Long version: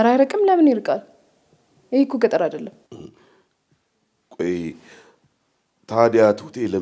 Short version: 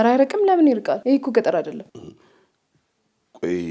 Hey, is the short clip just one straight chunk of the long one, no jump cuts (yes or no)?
no